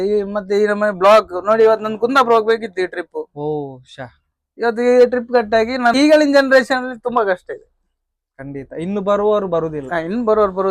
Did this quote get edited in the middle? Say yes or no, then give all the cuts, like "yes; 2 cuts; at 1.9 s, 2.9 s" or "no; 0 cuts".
yes; 1 cut; at 5.9 s